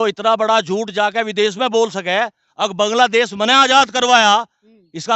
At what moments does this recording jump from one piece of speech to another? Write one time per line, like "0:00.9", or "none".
none